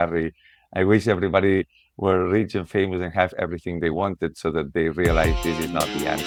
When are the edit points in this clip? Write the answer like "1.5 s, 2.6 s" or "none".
none